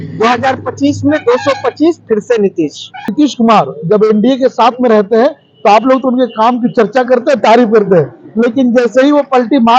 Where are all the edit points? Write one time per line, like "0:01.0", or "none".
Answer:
0:03.1